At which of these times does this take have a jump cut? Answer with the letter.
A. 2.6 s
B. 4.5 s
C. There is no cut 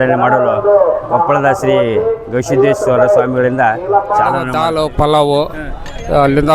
B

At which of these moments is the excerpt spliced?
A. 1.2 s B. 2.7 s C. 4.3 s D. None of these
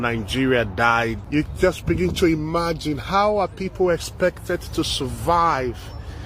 A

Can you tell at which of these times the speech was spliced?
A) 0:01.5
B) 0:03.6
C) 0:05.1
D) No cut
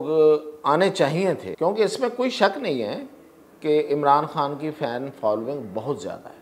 A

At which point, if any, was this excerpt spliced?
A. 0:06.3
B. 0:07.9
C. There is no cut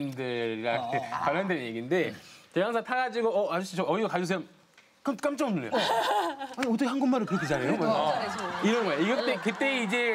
C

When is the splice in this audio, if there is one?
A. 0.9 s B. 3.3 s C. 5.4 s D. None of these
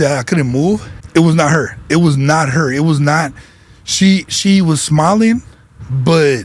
A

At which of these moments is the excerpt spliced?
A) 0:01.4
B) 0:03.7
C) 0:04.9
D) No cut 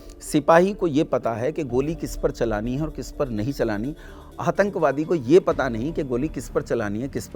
D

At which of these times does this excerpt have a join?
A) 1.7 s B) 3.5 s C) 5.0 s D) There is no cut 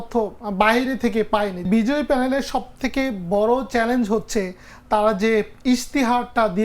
A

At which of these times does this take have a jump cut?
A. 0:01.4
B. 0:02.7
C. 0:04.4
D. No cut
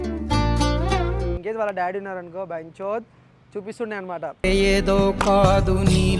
A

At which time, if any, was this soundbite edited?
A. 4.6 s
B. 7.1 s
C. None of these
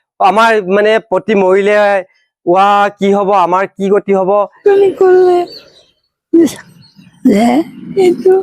A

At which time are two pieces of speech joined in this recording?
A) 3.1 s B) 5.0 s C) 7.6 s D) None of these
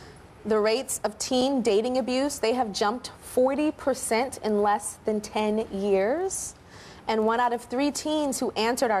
C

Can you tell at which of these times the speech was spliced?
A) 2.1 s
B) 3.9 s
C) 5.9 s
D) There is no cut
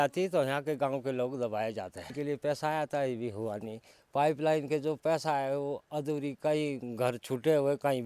A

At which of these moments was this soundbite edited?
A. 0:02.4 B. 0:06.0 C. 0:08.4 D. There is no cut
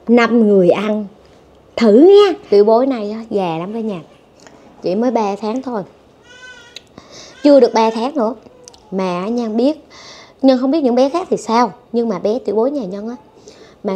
A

